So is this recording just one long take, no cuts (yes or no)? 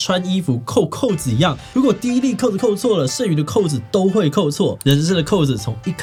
yes